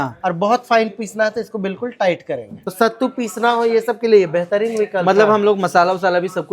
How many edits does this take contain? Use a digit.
1